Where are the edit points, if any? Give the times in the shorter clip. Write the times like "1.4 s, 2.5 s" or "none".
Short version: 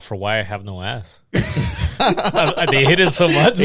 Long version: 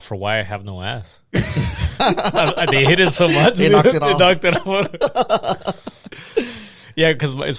none